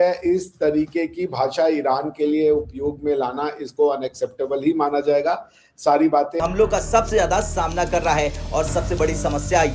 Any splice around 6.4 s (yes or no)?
yes